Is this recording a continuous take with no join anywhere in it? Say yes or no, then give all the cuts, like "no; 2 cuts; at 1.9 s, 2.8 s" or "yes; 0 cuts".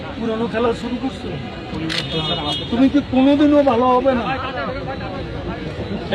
yes; 0 cuts